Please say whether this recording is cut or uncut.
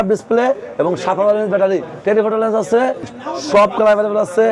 cut